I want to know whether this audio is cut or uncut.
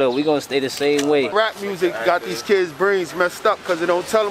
cut